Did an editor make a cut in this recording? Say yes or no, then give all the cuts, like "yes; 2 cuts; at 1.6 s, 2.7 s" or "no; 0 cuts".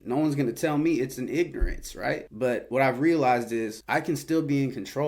yes; 2 cuts; at 2.3 s, 3.8 s